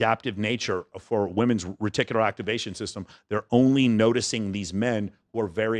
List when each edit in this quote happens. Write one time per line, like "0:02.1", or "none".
none